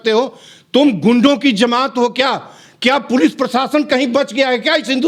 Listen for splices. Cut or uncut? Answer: uncut